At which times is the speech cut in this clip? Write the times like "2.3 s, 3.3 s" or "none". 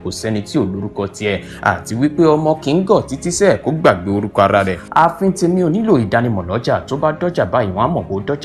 none